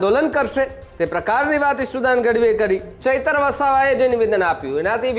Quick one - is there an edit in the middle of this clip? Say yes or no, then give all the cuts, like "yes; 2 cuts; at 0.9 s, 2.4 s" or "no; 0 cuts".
yes; 1 cut; at 2.9 s